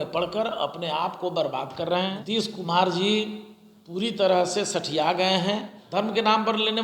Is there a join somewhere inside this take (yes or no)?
yes